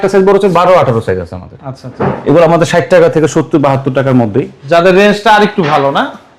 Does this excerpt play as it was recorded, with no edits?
yes; 0 cuts

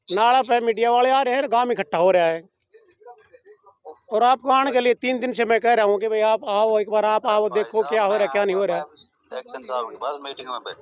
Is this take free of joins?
yes; 0 cuts

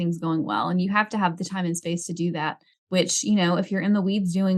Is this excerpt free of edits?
no; 1 cut; at 2.7 s

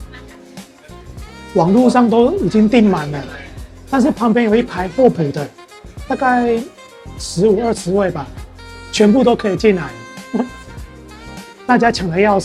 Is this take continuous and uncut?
yes; 0 cuts

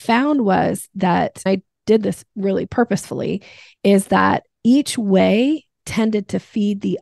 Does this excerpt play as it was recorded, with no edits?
no; 2 cuts; at 1.5 s, 2.7 s

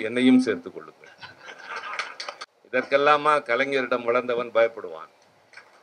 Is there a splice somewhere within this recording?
yes; 1 cut; at 2.5 s

